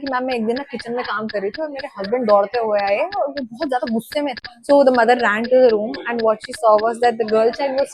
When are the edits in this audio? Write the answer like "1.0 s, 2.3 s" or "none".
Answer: 4.5 s

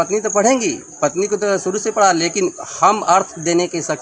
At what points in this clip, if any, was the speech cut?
none

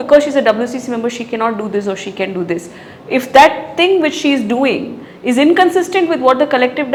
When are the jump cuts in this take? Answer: none

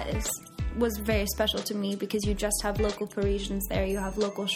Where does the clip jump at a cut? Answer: none

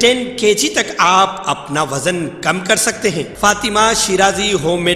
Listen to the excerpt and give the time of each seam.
3.3 s

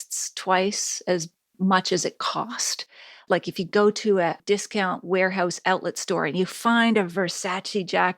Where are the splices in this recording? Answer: 2.9 s

